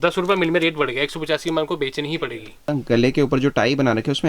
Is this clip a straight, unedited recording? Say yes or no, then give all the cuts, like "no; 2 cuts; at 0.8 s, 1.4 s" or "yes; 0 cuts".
no; 1 cut; at 2.7 s